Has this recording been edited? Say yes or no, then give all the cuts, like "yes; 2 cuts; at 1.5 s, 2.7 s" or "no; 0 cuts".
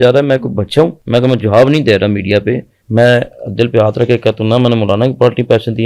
yes; 2 cuts; at 1.0 s, 2.7 s